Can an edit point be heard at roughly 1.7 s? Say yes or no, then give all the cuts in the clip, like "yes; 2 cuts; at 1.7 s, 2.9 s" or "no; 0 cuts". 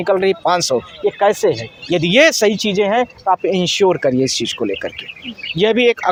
no; 0 cuts